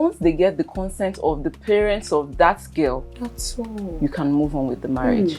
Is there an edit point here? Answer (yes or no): no